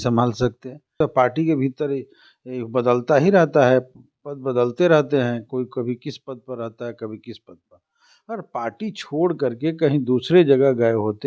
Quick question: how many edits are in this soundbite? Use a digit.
1